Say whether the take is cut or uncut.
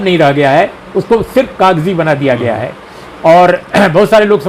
uncut